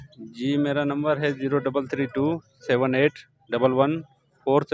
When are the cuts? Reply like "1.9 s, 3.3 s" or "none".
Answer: none